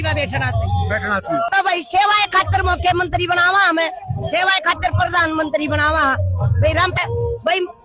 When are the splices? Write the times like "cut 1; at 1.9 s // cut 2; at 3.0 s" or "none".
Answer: cut 1; at 1.5 s // cut 2; at 7.0 s